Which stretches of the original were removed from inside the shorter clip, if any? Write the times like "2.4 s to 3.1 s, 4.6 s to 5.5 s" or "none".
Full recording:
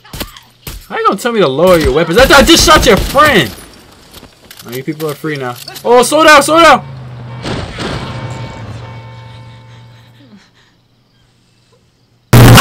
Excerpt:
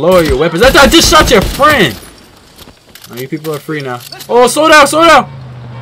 none